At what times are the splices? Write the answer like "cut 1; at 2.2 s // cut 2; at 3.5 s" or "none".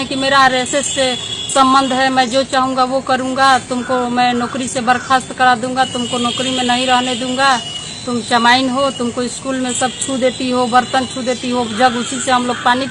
none